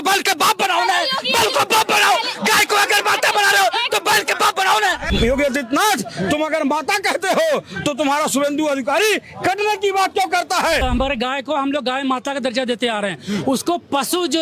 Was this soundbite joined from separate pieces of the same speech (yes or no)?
yes